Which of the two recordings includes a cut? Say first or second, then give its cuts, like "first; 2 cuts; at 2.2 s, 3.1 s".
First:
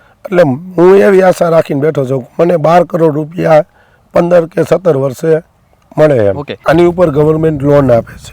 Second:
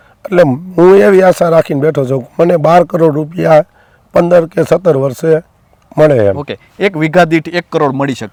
first; 1 cut; at 6.6 s